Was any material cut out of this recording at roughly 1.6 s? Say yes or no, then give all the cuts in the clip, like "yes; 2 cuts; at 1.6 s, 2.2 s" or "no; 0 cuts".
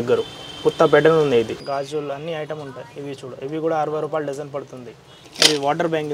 yes; 2 cuts; at 1.6 s, 5.2 s